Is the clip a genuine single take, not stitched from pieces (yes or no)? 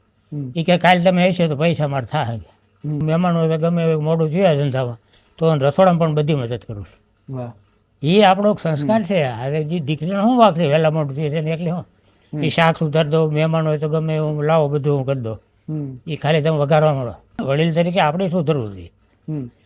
no